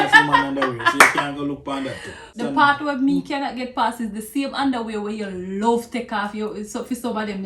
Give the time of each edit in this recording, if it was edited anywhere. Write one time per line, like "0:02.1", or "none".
0:02.2